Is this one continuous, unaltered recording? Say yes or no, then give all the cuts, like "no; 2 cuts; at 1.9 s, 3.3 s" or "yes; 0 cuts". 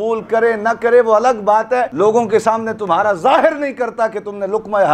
no; 1 cut; at 1.9 s